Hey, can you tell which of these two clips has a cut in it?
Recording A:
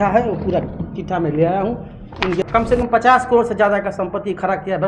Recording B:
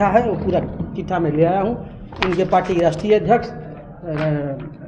A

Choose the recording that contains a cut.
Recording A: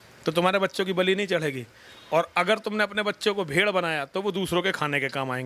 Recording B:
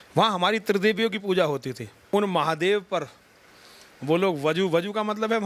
B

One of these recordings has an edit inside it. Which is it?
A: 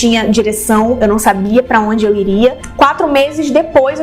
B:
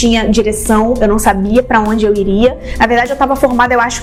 A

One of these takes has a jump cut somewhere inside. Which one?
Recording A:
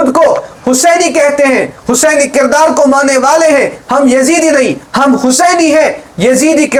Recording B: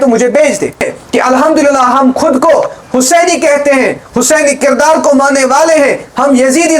B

